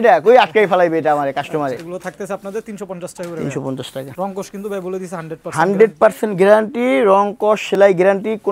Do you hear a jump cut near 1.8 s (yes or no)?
yes